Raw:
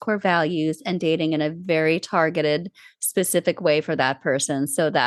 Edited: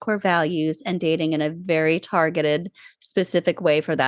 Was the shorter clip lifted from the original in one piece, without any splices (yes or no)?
yes